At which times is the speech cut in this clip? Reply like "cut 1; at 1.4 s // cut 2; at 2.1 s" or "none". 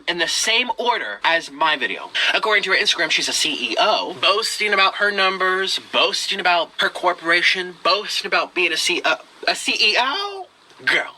cut 1; at 1.1 s // cut 2; at 2.2 s // cut 3; at 4.2 s // cut 4; at 6.8 s